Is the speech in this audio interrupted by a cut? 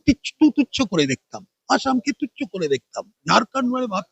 no; 0 cuts

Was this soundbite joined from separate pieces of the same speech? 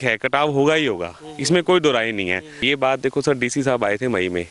yes; 1 cut; at 2.5 s

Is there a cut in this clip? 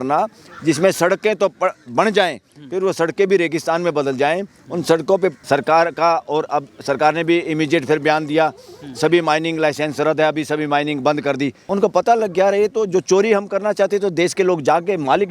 yes; 2 cuts; at 5.4 s, 11.6 s

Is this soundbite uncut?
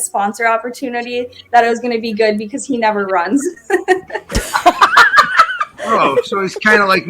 no; 1 cut; at 5.8 s

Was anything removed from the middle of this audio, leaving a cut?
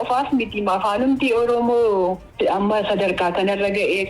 yes; 1 cut; at 2.3 s

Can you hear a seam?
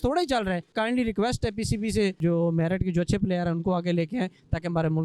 yes; 2 cuts; at 0.7 s, 2.2 s

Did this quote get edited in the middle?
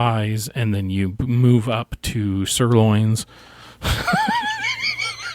no; 0 cuts

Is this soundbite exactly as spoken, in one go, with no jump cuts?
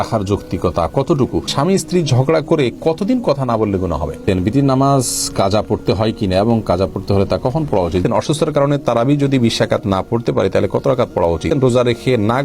no; 4 cuts; at 1.5 s, 4.2 s, 8.0 s, 11.5 s

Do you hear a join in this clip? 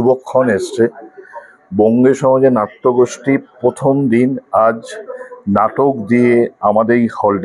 no; 0 cuts

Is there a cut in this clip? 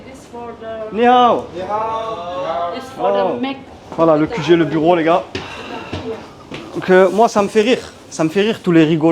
yes; 1 cut; at 3.6 s

